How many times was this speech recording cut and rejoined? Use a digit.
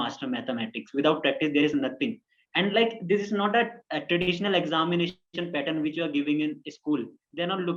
0